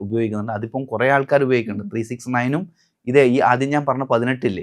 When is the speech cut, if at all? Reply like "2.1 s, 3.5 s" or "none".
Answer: none

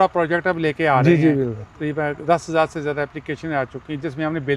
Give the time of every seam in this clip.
none

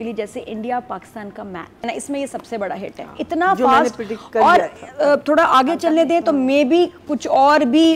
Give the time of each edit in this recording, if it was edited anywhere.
1.8 s

